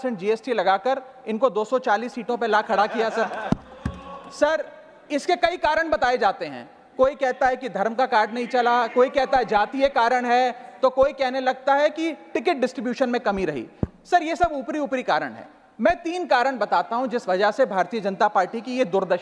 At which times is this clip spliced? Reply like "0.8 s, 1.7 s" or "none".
none